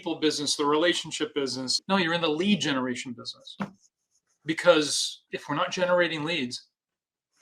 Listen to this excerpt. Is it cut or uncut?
cut